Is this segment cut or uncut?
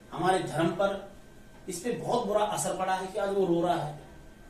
cut